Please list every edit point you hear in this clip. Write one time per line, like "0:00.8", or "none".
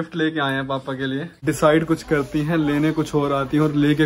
0:01.3